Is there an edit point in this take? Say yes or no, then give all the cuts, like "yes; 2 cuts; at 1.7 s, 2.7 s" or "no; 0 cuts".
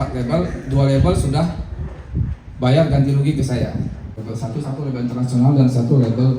yes; 1 cut; at 4.1 s